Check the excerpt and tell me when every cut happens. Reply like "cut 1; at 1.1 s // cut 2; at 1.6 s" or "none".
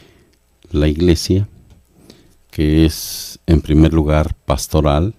cut 1; at 2.1 s